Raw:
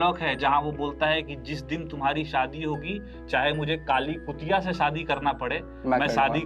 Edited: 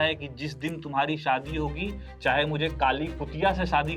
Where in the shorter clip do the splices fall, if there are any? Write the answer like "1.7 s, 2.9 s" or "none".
none